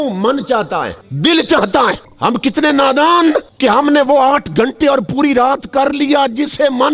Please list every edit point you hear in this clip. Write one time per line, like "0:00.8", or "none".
0:01.0
0:02.1
0:03.5